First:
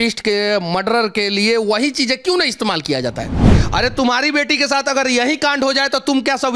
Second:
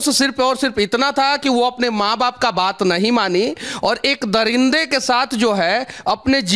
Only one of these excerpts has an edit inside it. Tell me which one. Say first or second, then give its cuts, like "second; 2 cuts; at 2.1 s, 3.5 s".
first; 1 cut; at 3.6 s